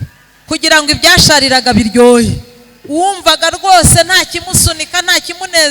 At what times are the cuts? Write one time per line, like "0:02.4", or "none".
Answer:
none